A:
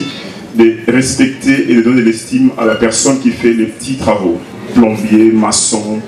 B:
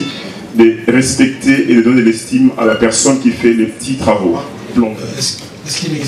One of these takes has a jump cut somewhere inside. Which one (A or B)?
B